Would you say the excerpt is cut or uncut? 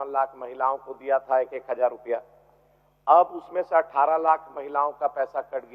uncut